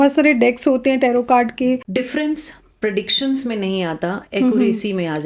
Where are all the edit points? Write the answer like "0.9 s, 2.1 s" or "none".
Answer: 1.8 s